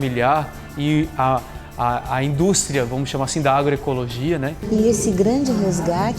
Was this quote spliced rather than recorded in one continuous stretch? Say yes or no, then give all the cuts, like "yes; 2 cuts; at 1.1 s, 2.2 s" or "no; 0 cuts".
yes; 1 cut; at 4.6 s